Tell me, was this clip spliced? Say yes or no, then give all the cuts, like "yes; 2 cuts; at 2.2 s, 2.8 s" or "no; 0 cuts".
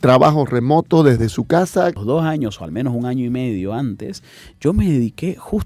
yes; 1 cut; at 2.0 s